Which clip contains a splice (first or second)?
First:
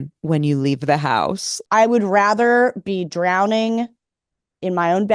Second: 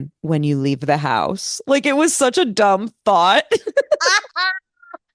first